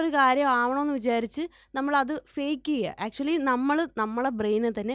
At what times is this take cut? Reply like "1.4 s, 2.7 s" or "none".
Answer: none